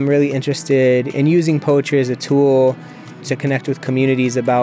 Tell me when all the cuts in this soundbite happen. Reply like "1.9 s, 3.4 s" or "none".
1.1 s, 3.2 s